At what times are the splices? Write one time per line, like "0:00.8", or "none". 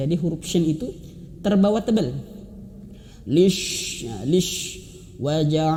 none